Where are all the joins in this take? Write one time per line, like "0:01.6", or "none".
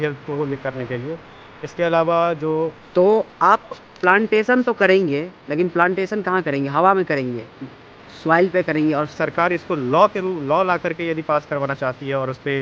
0:02.8
0:09.2